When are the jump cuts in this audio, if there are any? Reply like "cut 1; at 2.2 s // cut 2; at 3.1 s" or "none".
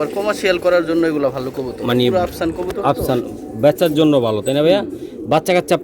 none